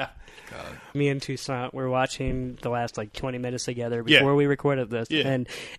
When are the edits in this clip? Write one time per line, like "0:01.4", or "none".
0:00.9